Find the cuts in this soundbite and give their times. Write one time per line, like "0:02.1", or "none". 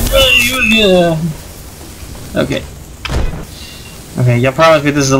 0:03.4